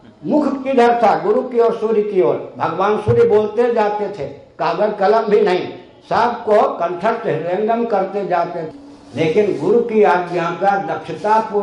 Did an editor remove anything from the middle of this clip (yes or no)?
yes